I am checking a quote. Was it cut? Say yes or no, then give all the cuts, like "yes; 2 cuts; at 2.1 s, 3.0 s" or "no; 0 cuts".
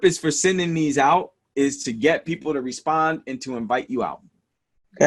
yes; 1 cut; at 1.4 s